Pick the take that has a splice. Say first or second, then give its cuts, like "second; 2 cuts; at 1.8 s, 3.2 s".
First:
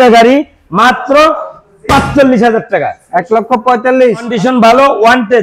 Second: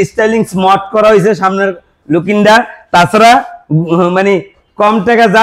first; 1 cut; at 4.3 s